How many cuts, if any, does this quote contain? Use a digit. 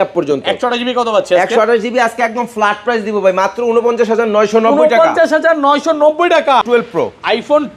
1